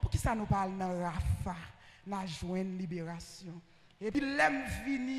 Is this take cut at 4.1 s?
yes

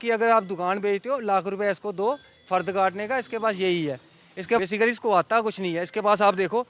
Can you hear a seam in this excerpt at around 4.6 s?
yes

